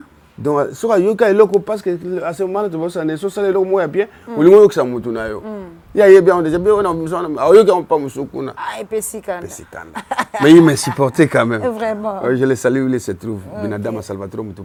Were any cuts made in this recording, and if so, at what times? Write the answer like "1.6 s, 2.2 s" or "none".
none